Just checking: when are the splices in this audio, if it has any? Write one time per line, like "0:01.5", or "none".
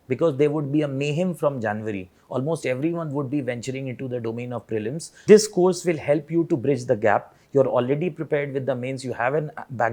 0:05.1